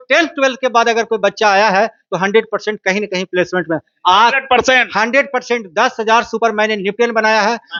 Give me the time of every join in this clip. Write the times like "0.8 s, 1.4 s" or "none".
none

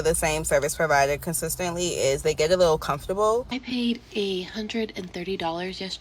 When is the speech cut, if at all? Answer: 3.7 s

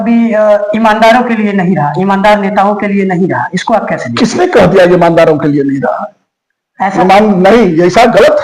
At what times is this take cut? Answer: none

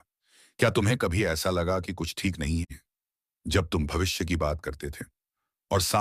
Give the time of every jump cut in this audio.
none

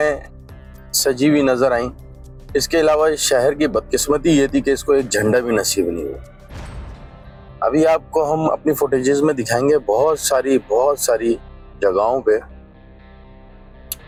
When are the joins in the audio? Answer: none

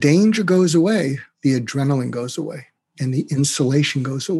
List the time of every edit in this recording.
1.3 s

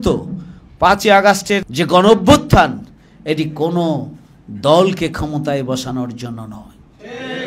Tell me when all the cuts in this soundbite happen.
1.7 s

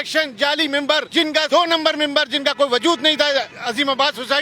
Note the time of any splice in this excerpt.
none

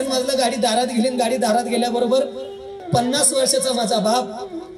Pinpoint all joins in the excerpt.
2.7 s

